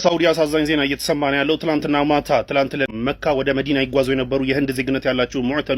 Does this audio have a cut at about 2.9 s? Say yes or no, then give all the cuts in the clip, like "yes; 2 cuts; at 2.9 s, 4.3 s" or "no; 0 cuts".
yes; 1 cut; at 2.9 s